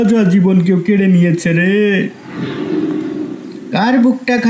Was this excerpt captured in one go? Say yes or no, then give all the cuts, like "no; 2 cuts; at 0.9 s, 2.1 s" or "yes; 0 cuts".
no; 2 cuts; at 2.3 s, 3.6 s